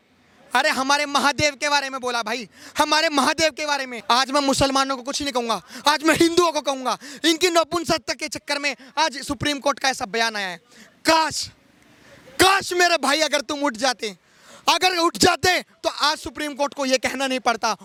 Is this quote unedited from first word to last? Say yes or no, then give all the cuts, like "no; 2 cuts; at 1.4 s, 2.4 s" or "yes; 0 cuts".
yes; 0 cuts